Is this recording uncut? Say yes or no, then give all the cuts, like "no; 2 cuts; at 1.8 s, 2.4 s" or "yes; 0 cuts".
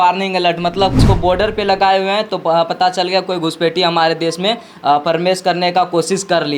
no; 1 cut; at 1.0 s